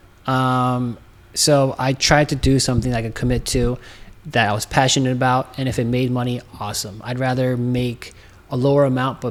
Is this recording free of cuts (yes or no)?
yes